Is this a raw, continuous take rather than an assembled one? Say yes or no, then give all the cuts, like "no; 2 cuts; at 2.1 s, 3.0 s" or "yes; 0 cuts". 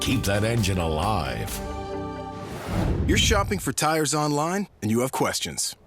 no; 1 cut; at 2.8 s